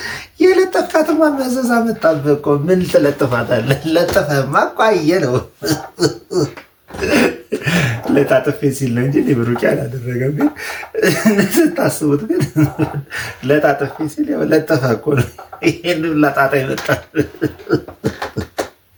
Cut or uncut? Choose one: uncut